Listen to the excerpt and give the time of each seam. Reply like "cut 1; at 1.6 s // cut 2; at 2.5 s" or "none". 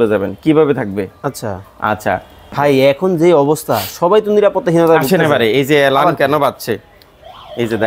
cut 1; at 2.4 s